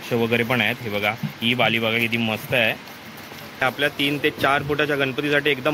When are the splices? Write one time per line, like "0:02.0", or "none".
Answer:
0:03.6

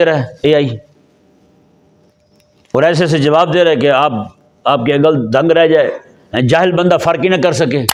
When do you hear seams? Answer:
none

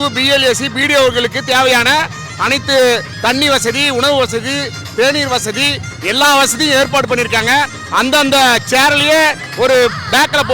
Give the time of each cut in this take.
none

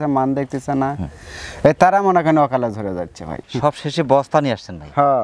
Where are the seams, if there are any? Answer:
0:03.4

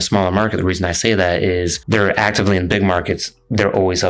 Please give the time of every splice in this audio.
0:01.8

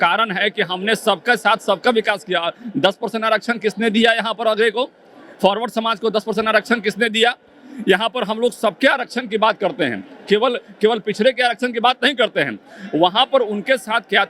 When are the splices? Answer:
none

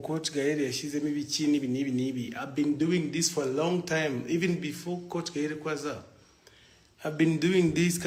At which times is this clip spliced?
none

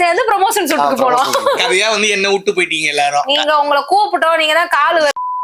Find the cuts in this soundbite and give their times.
none

